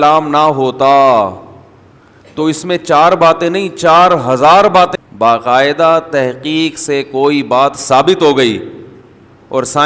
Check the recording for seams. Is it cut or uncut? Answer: cut